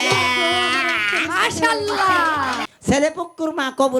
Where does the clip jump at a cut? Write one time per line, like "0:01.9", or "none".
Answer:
0:02.7